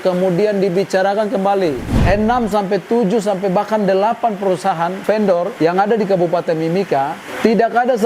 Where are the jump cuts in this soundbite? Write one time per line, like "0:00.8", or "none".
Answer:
0:02.0
0:05.2

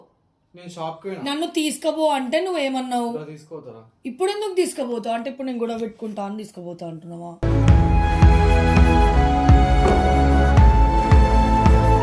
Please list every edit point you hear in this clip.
none

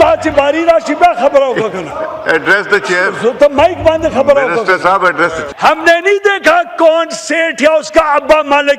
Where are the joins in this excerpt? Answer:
0:05.5

